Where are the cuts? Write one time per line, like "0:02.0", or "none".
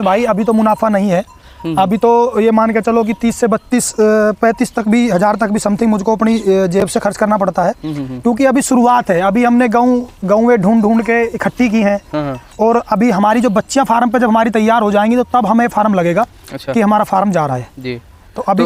none